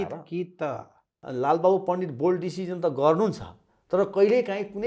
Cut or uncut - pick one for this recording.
cut